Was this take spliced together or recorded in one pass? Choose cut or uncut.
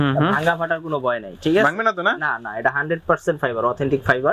uncut